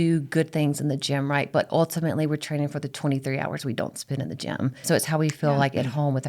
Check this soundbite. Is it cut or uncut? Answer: cut